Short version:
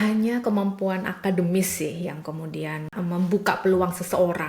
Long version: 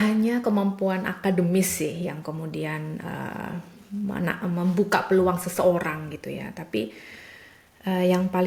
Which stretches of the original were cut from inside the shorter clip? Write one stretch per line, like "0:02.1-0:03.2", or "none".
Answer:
0:02.9-0:04.4